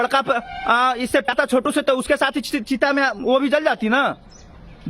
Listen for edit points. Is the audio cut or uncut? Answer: cut